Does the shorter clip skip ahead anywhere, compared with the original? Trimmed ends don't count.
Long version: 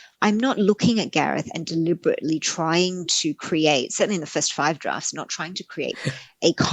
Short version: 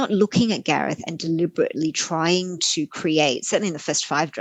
no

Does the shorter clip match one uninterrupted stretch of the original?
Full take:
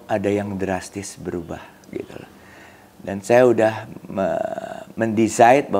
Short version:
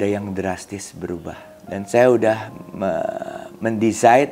no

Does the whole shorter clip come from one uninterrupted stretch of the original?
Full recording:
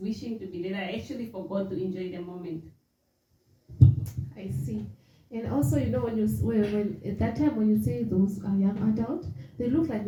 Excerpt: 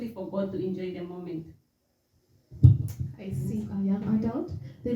no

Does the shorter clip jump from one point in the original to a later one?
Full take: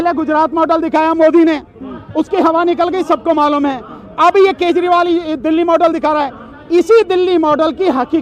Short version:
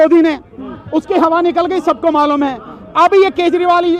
no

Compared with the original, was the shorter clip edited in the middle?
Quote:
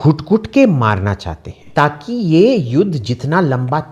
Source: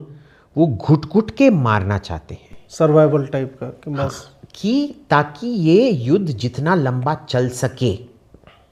yes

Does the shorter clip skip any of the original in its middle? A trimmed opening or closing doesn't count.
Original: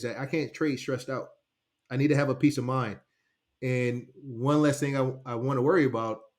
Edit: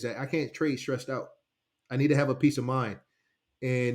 no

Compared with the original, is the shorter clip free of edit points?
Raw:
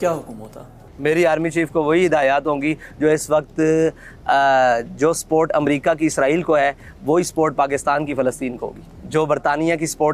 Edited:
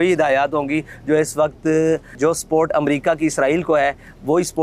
no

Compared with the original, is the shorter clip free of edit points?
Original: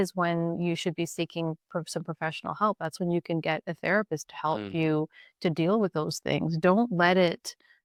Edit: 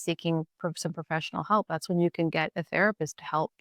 yes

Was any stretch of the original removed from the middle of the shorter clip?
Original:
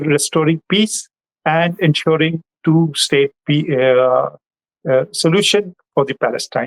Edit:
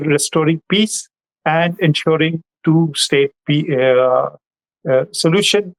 no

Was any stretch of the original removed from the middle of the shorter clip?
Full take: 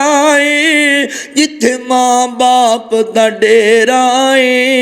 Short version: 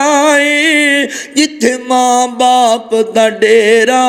no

